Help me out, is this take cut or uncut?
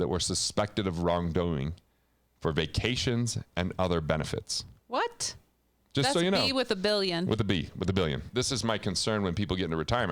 cut